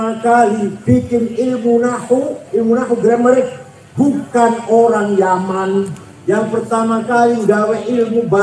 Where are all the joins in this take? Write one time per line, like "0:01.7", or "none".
0:06.1